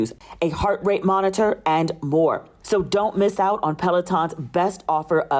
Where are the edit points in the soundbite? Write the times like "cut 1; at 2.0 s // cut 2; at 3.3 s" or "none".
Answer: cut 1; at 2.5 s